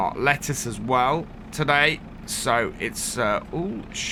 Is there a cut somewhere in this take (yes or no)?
no